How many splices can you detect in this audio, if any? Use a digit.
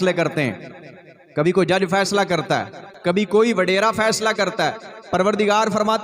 1